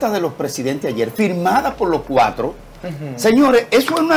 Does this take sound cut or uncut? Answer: uncut